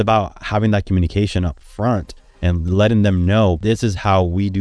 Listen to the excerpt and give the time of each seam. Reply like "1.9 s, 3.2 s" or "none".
2.2 s, 3.6 s